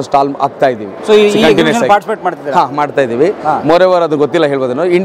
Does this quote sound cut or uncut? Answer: uncut